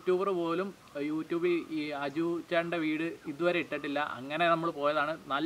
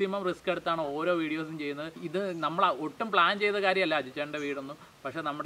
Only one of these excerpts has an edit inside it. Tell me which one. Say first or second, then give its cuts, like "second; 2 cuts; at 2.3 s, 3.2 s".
second; 1 cut; at 2.4 s